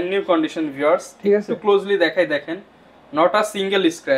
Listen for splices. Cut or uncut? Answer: uncut